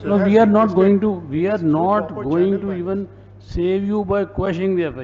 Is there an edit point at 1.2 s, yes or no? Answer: no